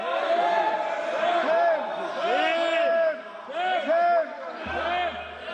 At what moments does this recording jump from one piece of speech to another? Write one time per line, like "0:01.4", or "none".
none